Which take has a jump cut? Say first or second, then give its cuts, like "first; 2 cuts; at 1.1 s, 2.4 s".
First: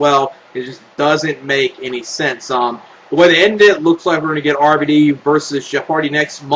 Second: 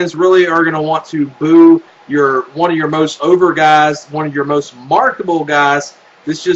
second; 1 cut; at 3.1 s